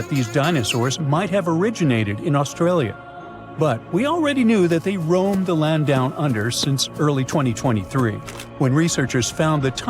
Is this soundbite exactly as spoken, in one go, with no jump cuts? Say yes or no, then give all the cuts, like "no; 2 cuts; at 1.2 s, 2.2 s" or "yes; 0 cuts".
yes; 0 cuts